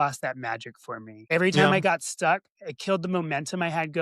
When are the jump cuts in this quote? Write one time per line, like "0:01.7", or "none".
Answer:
0:01.2